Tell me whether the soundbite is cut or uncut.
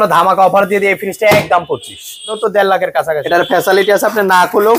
cut